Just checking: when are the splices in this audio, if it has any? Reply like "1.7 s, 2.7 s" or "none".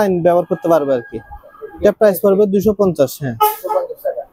none